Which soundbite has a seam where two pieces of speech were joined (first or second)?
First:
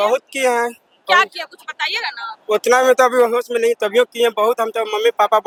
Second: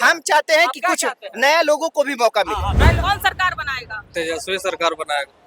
second